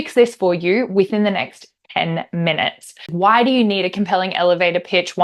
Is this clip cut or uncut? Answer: cut